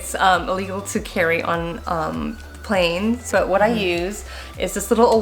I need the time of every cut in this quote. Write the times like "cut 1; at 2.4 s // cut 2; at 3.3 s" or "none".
cut 1; at 3.3 s